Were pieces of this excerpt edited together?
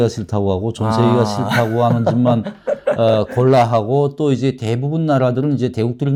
no; 0 cuts

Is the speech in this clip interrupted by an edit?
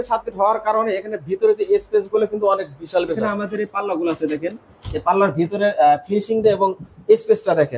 yes; 1 cut; at 3.3 s

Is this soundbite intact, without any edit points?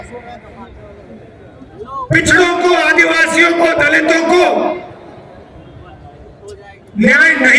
yes; 0 cuts

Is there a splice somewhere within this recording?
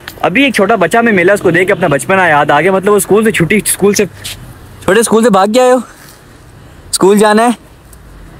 no; 0 cuts

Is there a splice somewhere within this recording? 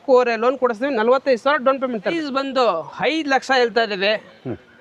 yes; 1 cut; at 2.1 s

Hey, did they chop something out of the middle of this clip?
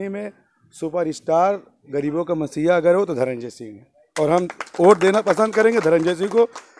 no; 0 cuts

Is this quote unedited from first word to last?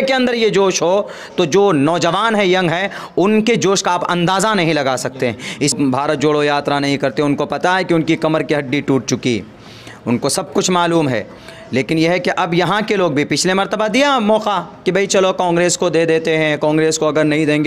no; 1 cut; at 5.7 s

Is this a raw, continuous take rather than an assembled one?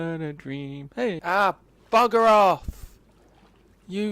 no; 1 cut; at 1.2 s

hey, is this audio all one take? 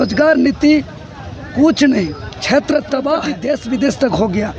no; 1 cut; at 3.3 s

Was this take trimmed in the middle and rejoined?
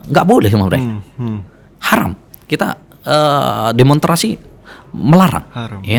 no; 0 cuts

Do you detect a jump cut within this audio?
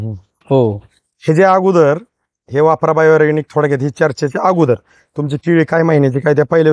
no; 0 cuts

